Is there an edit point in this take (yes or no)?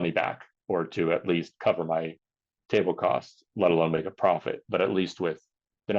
no